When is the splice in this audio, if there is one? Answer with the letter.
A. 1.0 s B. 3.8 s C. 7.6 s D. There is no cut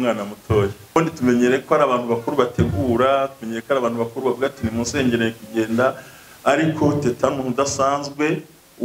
A